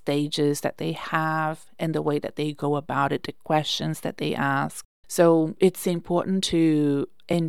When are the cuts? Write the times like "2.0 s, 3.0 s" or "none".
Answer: none